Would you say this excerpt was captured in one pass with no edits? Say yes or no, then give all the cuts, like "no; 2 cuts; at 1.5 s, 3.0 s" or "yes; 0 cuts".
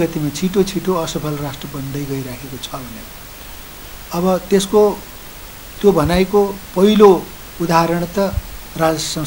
yes; 0 cuts